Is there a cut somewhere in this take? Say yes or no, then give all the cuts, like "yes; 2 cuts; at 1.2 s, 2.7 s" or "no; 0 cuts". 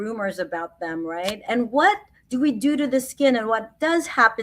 yes; 1 cut; at 1.4 s